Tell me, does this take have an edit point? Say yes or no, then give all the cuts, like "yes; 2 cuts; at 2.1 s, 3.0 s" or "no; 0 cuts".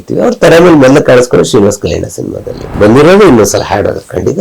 yes; 1 cut; at 2.7 s